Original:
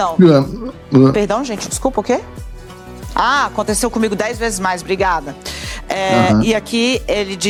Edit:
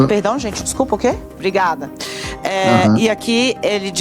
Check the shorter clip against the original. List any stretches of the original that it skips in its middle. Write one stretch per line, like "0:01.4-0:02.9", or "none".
0:02.4-0:04.8